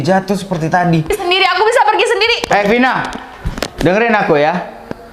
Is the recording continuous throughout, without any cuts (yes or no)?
no